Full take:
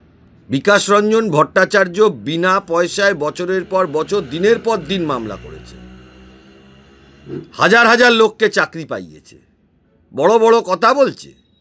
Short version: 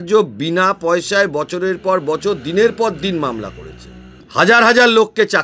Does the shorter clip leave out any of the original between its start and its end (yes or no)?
yes